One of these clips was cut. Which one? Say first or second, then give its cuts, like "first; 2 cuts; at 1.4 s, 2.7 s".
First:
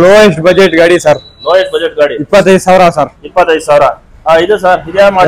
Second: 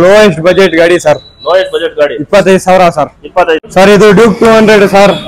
second; 1 cut; at 3.7 s